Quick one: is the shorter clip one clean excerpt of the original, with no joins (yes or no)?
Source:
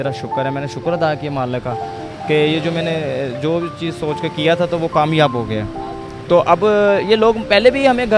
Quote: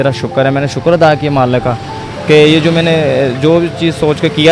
yes